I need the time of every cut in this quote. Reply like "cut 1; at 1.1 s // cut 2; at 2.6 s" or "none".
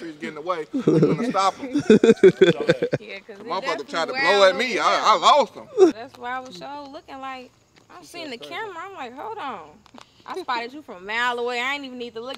none